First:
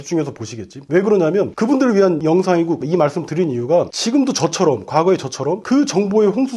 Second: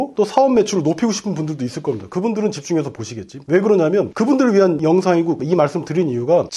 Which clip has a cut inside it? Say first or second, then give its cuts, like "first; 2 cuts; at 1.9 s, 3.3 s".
first; 1 cut; at 5.6 s